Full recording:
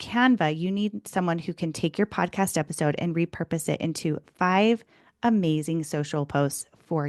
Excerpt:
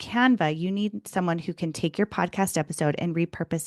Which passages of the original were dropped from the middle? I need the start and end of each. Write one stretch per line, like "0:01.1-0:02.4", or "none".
none